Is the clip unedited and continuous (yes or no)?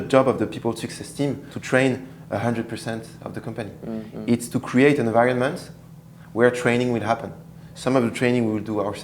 no